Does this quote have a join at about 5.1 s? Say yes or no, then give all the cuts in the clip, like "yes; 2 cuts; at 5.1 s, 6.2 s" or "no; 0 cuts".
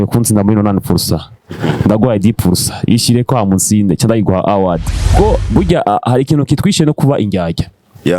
yes; 1 cut; at 5.1 s